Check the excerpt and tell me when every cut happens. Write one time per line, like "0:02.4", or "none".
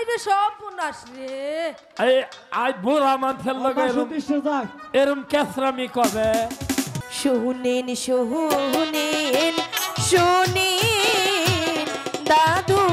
0:07.0